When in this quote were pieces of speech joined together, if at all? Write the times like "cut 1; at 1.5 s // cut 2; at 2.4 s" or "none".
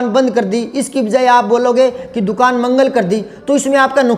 none